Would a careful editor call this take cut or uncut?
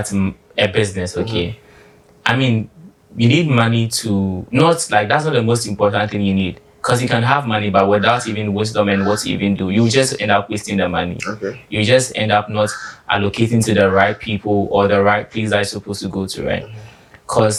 uncut